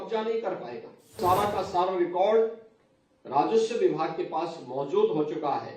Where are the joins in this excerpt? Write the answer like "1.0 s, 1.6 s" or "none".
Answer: 1.2 s